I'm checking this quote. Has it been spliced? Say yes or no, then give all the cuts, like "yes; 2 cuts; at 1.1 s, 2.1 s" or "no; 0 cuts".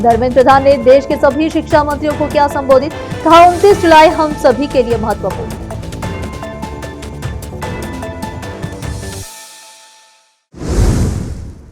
yes; 1 cut; at 10.4 s